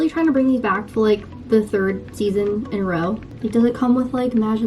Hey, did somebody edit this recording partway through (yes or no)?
yes